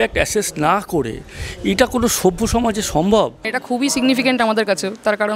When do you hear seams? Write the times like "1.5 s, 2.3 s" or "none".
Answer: none

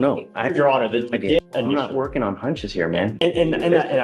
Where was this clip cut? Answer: 1.4 s

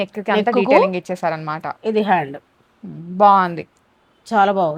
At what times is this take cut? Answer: none

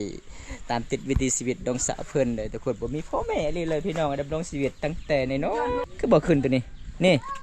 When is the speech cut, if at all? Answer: 5.9 s

